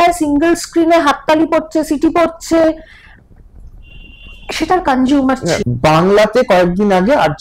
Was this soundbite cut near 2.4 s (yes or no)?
no